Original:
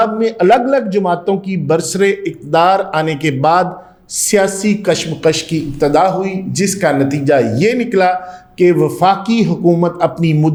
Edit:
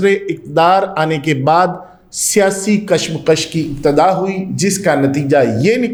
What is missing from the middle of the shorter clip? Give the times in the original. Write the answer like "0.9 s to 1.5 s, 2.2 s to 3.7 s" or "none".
none